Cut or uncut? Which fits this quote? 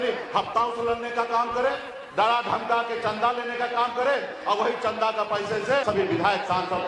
cut